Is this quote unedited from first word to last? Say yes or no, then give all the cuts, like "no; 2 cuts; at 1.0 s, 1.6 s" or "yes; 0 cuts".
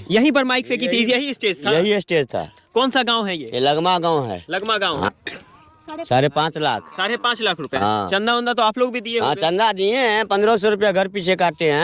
no; 1 cut; at 5.0 s